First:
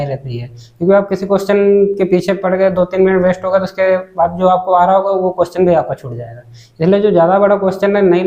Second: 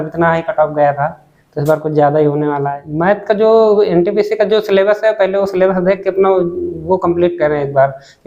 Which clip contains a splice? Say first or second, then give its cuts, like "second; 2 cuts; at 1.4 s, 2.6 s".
second; 1 cut; at 2.8 s